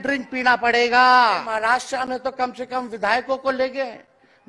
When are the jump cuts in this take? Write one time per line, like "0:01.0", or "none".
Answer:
0:01.5